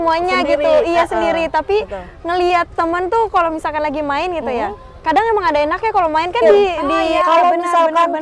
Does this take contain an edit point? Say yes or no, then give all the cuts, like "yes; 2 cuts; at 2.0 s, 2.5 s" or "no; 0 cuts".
yes; 1 cut; at 7.1 s